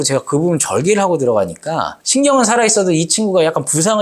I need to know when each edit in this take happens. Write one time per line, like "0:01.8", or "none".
none